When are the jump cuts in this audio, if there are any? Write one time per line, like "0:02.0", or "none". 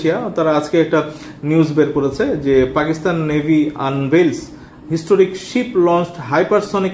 none